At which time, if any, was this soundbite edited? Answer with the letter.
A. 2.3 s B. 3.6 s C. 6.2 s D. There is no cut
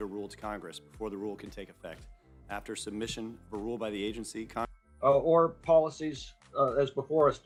D